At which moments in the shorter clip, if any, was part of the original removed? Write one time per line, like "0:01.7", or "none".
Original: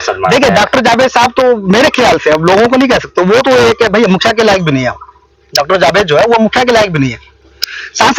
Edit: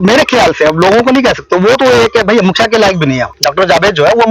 0:03.3